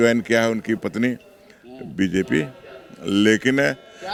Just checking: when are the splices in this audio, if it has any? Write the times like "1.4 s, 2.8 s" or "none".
none